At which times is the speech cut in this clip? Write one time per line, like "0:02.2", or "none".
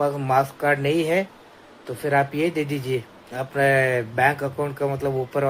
none